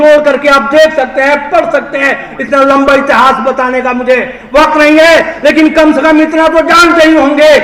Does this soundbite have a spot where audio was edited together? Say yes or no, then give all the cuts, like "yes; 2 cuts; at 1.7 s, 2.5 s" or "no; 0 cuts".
no; 0 cuts